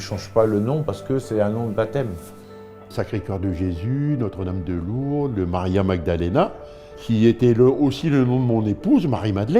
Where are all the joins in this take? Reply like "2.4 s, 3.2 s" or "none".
2.9 s, 6.9 s